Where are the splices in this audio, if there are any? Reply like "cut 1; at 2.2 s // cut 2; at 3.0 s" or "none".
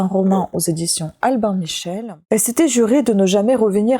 cut 1; at 2.0 s

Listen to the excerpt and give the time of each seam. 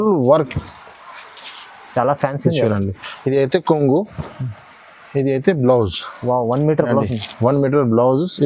none

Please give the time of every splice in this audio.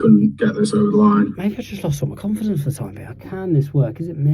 cut 1; at 1.3 s // cut 2; at 3.1 s

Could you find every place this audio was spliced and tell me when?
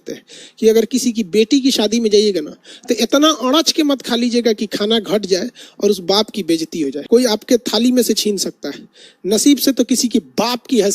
cut 1; at 7.3 s

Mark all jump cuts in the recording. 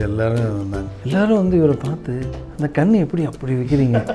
cut 1; at 0.9 s

